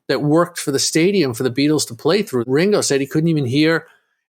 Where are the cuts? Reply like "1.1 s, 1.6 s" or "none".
2.5 s

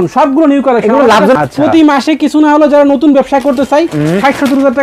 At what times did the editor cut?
1.4 s

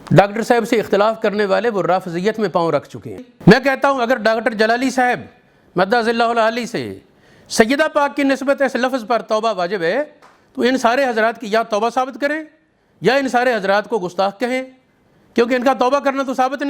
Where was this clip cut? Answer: 3.2 s

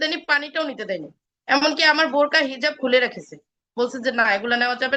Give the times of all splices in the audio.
none

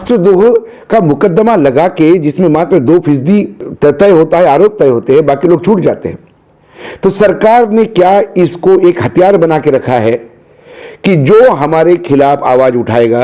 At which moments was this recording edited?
3.6 s

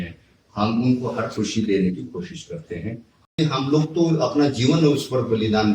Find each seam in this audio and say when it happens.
3.4 s

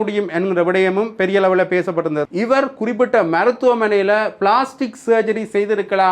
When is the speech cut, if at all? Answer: 2.3 s

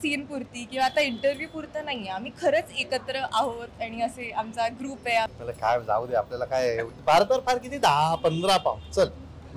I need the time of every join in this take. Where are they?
5.4 s

